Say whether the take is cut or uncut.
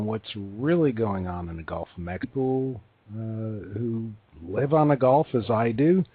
uncut